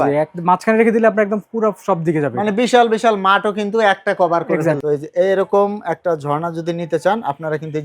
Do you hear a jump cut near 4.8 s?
yes; 1 cut; at 4.8 s

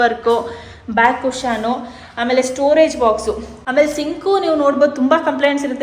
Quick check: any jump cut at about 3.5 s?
yes; 1 cut; at 3.5 s

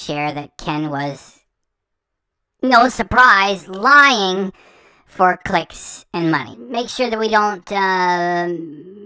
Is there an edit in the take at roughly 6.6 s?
yes; 1 cut; at 6.6 s

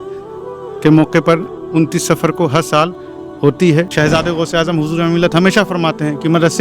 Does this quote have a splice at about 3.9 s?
yes; 1 cut; at 3.9 s

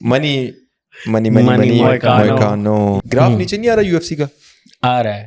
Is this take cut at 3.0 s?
yes; 1 cut; at 3.0 s

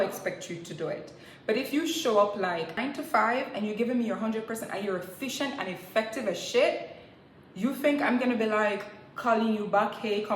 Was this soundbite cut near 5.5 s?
no; 1 cut; at 2.8 s

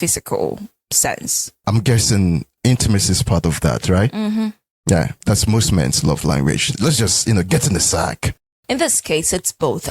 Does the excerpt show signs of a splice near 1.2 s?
no; 3 cuts; at 2.5 s, 5.1 s, 6.7 s

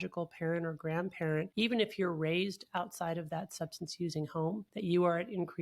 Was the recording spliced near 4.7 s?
yes; 2 cuts; at 1.5 s, 4.7 s

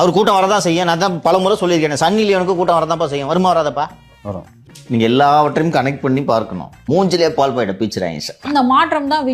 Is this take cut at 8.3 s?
no; 0 cuts

